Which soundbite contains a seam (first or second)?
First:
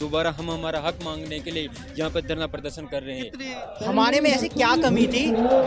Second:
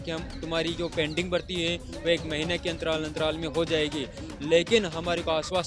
first